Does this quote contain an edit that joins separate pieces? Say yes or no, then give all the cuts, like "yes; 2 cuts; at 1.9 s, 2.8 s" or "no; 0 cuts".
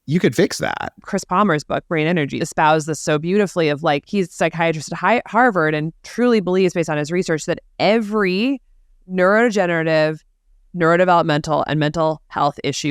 yes; 3 cuts; at 1.0 s, 2.4 s, 4.1 s